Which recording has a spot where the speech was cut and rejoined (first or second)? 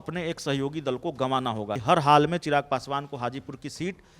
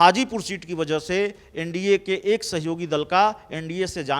first